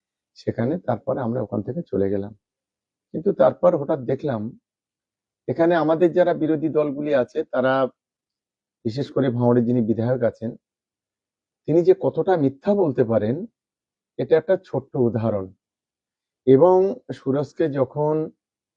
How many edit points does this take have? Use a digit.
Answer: 0